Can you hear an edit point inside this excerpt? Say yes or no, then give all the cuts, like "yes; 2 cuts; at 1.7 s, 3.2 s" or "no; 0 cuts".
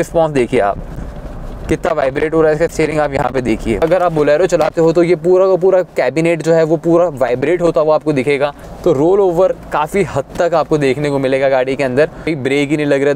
yes; 3 cuts; at 3.8 s, 8.7 s, 12.3 s